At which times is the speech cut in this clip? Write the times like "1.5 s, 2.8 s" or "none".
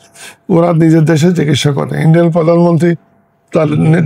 none